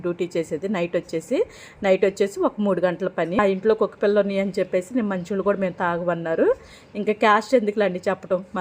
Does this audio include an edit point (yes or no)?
yes